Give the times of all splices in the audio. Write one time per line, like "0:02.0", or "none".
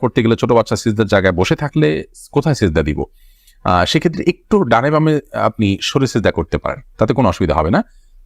none

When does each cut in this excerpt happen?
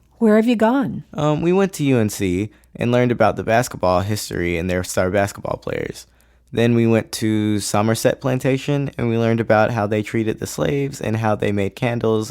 0:01.0

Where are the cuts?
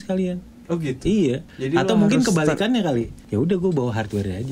0:01.5
0:03.2

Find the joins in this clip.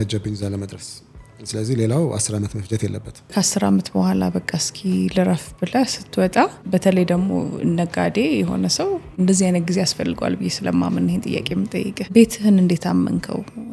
0:03.3
0:06.6
0:09.1
0:12.1

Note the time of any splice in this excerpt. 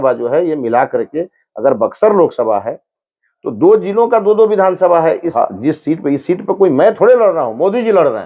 0:05.3

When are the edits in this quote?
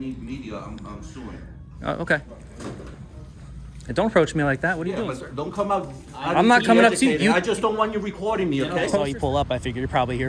0:02.4
0:04.9
0:08.9

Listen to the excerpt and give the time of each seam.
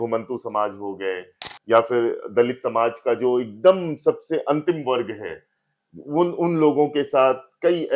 none

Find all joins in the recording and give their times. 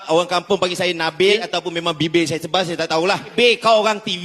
0:01.4
0:03.3

